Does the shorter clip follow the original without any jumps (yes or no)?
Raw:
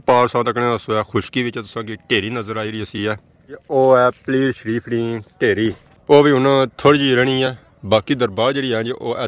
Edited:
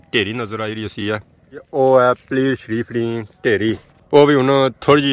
yes